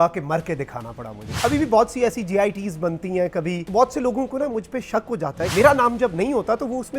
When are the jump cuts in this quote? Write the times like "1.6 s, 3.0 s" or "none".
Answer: 1.3 s, 3.6 s, 5.5 s